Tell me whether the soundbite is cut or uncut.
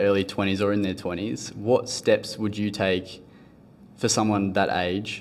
uncut